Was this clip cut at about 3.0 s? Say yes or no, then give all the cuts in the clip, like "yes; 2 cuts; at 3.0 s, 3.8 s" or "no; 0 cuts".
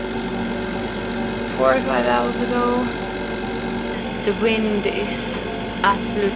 yes; 1 cut; at 3.0 s